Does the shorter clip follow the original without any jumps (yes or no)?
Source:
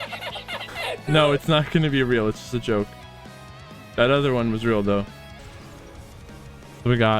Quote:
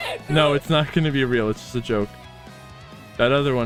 yes